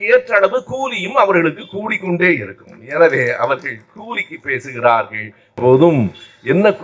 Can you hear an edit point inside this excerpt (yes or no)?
yes